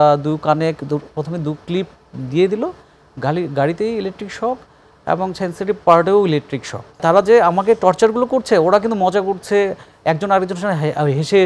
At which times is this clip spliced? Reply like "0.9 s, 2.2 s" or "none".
7.0 s

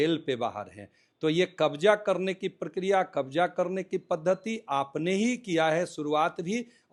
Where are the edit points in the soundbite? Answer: none

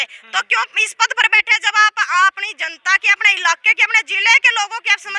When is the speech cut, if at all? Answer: none

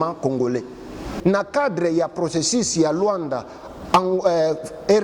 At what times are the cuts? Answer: 1.1 s

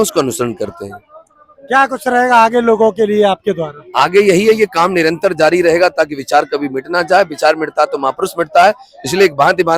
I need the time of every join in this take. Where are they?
none

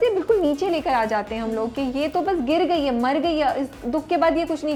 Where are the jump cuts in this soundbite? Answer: none

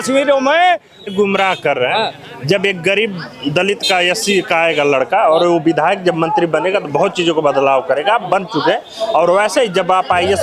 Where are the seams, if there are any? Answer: 1.1 s

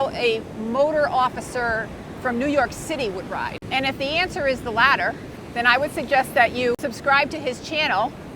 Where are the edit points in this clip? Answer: 3.6 s, 5.3 s, 6.8 s

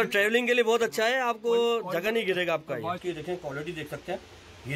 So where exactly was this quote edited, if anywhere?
3.0 s

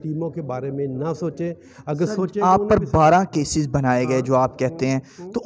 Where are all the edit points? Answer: none

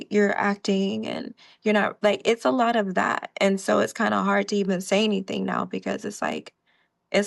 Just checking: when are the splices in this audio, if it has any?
none

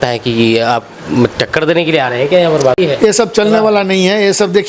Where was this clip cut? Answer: 2.8 s

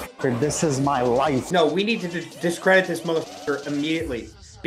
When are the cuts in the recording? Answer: 1.5 s

